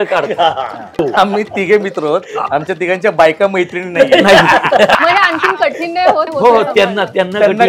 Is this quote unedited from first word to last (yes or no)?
no